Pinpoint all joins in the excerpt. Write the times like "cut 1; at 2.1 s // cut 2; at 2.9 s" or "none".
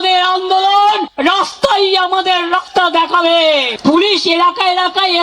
cut 1; at 3.7 s